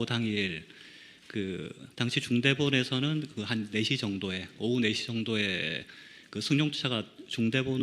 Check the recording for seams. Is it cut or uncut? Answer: cut